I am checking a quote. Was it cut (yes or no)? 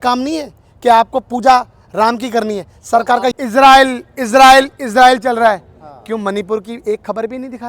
yes